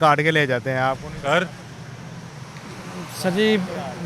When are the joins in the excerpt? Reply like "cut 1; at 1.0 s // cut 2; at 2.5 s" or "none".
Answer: none